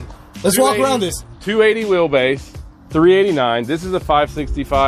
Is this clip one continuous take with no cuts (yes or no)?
yes